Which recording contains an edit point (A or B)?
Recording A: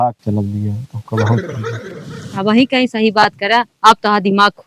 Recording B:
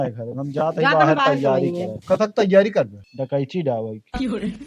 B